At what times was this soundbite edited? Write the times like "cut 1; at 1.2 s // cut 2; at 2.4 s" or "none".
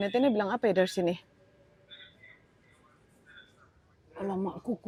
none